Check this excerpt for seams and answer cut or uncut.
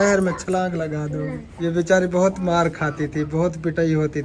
cut